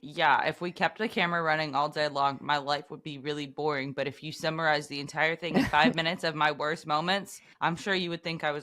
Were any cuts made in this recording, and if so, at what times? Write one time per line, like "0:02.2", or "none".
0:07.4